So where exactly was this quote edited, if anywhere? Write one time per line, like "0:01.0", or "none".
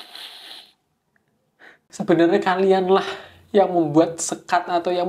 0:01.7